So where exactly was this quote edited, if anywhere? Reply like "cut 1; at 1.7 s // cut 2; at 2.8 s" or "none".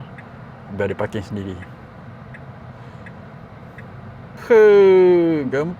cut 1; at 4.4 s